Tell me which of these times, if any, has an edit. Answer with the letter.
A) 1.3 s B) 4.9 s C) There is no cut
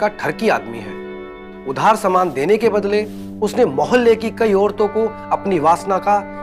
C